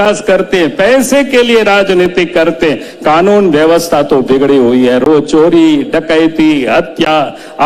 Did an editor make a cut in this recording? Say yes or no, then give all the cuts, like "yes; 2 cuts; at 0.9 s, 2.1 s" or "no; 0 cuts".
no; 0 cuts